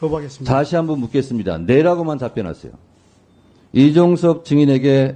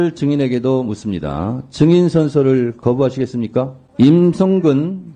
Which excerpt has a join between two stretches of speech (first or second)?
second